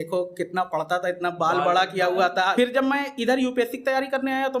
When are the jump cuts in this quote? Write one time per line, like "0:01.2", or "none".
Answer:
0:02.5